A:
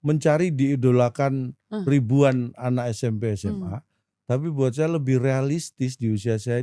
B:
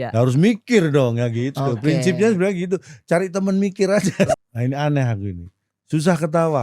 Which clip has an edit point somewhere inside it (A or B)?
B